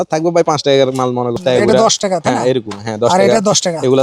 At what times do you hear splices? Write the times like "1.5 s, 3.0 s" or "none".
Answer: 1.4 s